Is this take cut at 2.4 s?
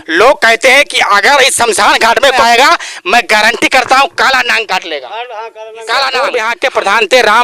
yes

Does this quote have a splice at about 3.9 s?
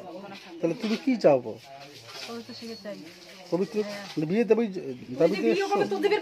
yes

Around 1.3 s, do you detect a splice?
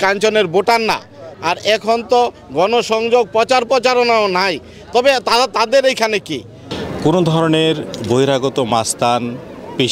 yes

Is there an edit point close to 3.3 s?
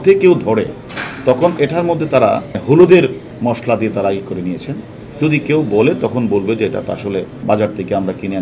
yes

